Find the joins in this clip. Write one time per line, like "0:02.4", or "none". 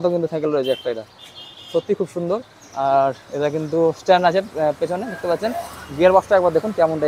none